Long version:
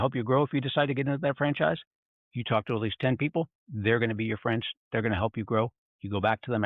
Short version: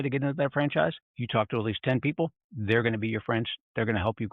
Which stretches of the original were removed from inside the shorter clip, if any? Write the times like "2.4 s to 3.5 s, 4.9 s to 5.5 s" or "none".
2.0 s to 2.3 s